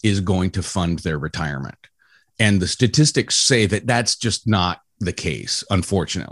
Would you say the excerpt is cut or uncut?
uncut